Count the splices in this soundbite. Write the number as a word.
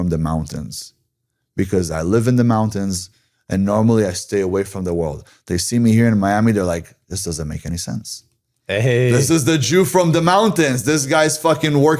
zero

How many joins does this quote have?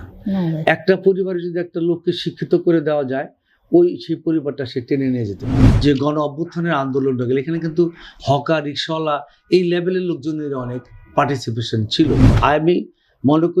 two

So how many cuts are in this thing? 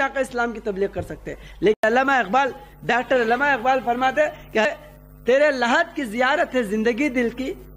two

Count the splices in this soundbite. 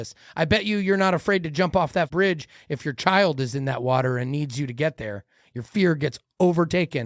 one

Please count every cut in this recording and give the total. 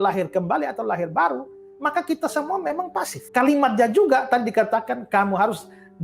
one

